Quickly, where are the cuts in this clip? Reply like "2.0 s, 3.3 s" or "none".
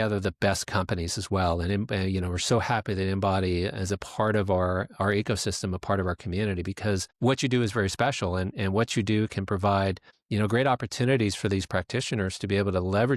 none